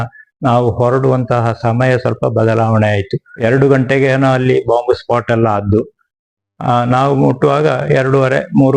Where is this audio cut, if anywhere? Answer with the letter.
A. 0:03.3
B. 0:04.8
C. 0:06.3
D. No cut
A